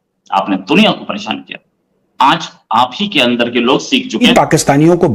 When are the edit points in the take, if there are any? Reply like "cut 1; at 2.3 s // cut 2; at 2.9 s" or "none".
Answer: cut 1; at 4.2 s